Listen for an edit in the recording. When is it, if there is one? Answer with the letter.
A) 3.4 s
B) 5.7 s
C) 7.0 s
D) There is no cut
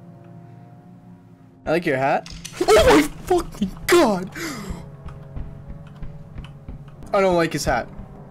C